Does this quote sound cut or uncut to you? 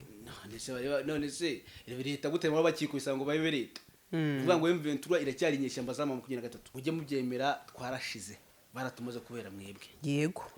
cut